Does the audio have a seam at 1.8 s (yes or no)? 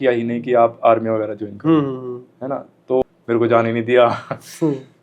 no